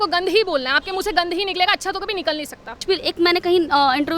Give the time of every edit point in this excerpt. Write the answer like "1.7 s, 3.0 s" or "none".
2.8 s